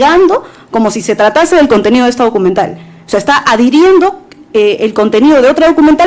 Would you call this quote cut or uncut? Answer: uncut